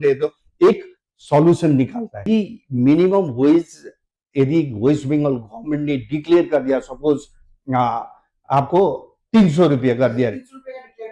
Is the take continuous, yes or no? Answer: no